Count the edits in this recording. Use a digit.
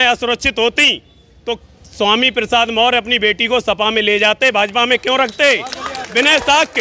0